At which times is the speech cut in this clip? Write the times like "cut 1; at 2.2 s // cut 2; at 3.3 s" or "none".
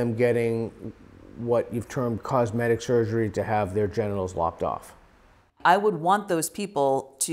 cut 1; at 5.5 s